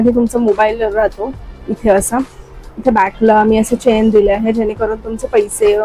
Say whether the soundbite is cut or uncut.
uncut